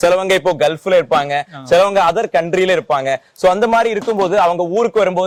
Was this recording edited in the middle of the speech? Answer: no; 0 cuts

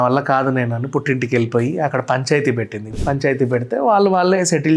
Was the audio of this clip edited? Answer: yes; 1 cut; at 3.0 s

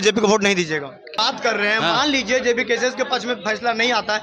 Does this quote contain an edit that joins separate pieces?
yes; 1 cut; at 1.2 s

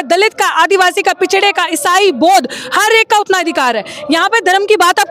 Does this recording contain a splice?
no; 0 cuts

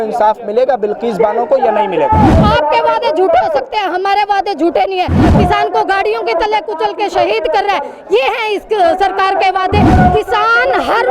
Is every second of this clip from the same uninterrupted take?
no; 3 cuts; at 2.4 s, 5.3 s, 9.9 s

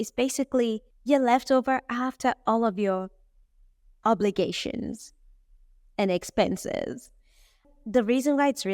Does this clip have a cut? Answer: yes; 1 cut; at 7.6 s

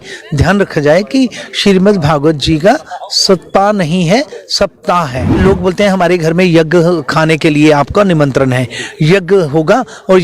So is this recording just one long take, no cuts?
no; 1 cut; at 5.4 s

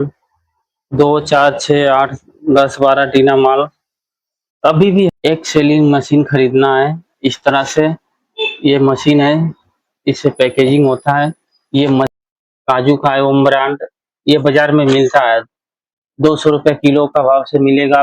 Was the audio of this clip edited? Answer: yes; 2 cuts; at 5.1 s, 12.1 s

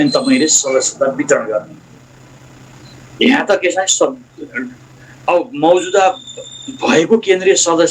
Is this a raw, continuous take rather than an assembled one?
yes; 0 cuts

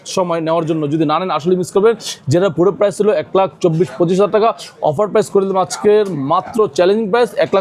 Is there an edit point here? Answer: no; 0 cuts

